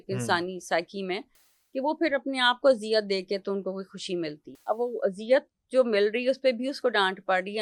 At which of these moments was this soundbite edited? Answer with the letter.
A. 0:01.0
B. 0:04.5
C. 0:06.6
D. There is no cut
B